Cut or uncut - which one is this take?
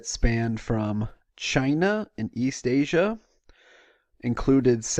uncut